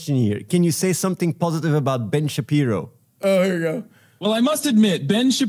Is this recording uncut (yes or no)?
yes